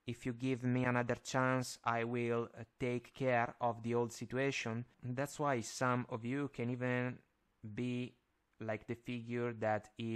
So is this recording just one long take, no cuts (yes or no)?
no